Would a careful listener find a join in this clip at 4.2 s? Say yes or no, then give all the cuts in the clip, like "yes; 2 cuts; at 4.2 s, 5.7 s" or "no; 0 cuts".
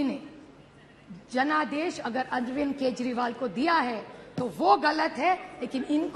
no; 0 cuts